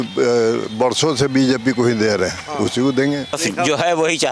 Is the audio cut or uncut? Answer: cut